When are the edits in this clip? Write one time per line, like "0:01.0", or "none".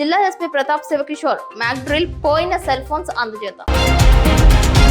0:03.6